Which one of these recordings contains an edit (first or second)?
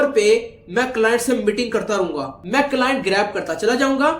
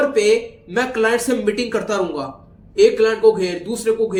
first